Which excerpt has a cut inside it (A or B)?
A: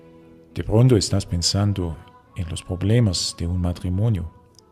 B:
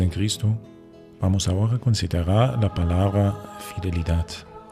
A